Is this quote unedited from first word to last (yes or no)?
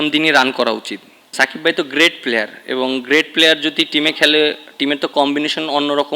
no